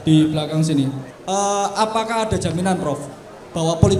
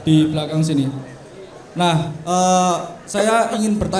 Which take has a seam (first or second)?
first